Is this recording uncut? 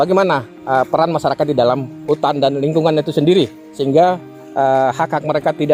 yes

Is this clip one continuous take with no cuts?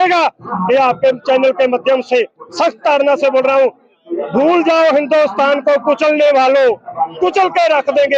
yes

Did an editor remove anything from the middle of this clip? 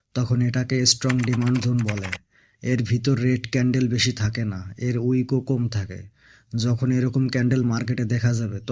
no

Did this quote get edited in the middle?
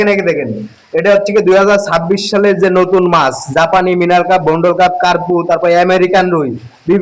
no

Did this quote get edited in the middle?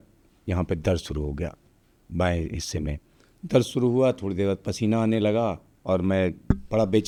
no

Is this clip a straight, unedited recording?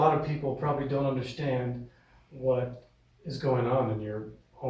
yes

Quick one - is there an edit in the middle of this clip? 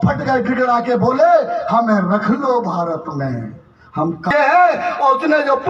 yes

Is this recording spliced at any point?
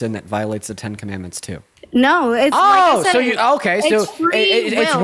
yes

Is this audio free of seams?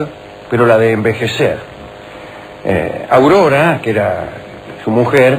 no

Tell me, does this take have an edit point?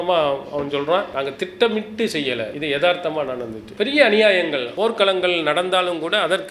yes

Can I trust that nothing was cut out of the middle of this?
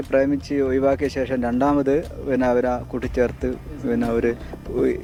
yes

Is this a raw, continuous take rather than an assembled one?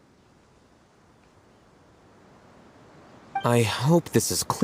no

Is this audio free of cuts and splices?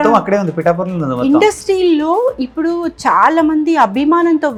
yes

